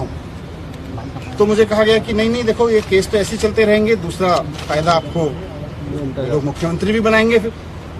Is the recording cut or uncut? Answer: uncut